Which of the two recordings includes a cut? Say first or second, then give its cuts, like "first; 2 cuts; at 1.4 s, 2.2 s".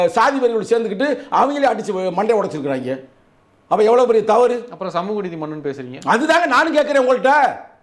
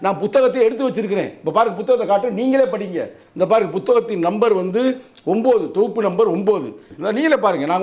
second; 1 cut; at 6.9 s